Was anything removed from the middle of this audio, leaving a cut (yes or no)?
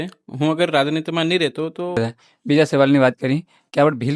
yes